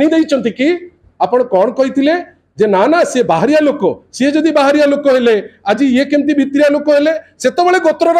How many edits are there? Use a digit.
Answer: 1